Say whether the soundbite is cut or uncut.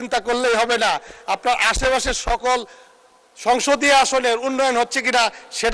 uncut